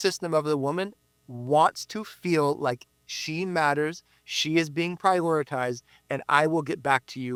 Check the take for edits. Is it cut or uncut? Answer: uncut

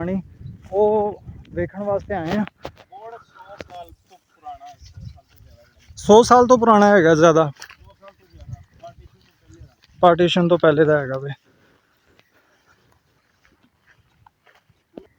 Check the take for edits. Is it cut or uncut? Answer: uncut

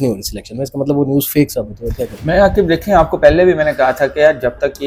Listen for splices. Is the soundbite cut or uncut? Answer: uncut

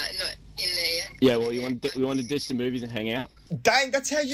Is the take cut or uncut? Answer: cut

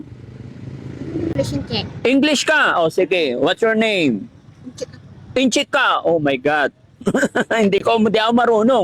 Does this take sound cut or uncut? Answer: cut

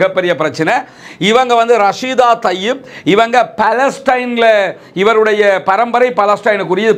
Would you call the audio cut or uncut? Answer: uncut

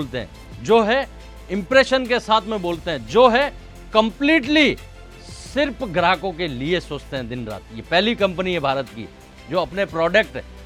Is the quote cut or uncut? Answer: uncut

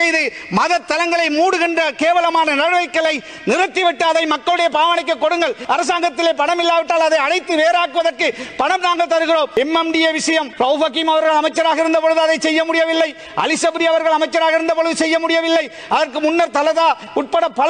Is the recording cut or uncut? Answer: cut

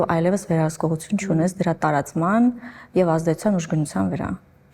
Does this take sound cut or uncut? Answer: uncut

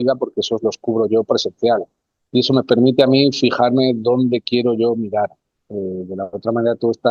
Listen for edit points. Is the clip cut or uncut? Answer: uncut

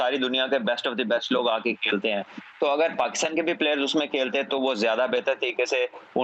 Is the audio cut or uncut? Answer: uncut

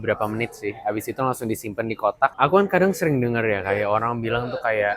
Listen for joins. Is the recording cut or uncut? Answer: cut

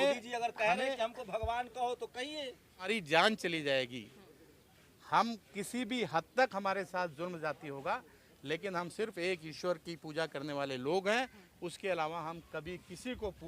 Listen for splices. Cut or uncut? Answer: cut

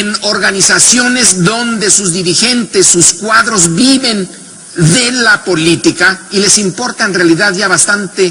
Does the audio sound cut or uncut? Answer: uncut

